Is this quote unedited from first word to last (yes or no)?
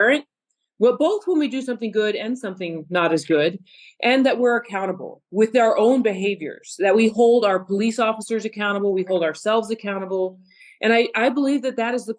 yes